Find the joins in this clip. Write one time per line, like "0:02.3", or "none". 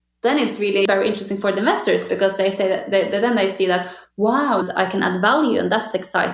0:00.8
0:04.6